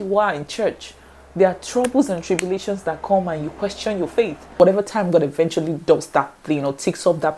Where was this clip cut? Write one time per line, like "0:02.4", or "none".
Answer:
0:04.6